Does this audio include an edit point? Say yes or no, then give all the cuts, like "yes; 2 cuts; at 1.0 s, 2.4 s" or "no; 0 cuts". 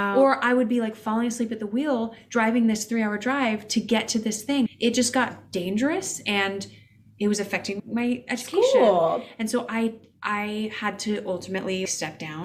no; 0 cuts